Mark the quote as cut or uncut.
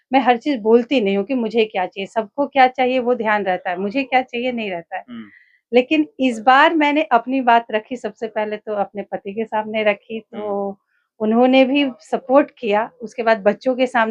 uncut